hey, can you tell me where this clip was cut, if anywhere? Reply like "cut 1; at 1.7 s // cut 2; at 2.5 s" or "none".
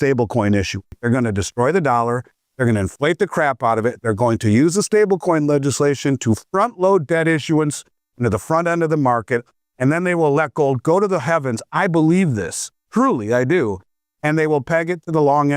cut 1; at 0.9 s

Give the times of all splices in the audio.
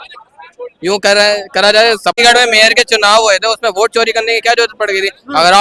cut 1; at 2.2 s

